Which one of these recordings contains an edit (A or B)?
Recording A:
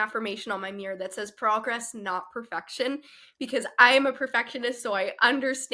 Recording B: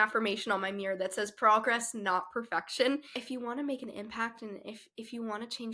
B